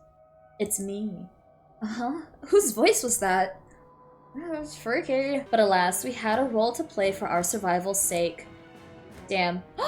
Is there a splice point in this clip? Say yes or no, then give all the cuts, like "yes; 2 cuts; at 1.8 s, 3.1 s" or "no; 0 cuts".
yes; 1 cut; at 5.4 s